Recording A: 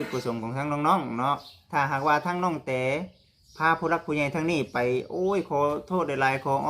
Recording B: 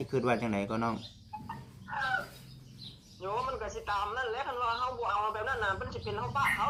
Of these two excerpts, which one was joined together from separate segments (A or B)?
A